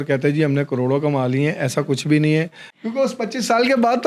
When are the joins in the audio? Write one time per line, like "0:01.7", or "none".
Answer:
0:02.6